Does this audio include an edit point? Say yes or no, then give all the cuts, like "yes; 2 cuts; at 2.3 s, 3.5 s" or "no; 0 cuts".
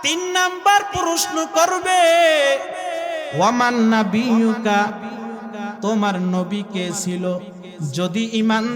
no; 0 cuts